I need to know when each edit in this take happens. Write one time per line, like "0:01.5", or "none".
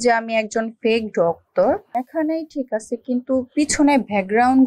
0:02.0